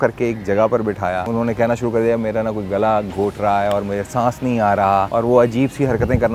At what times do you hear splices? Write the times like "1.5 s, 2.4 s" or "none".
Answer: 1.3 s, 5.1 s